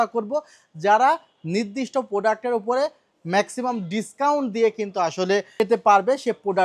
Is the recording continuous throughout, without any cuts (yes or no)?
no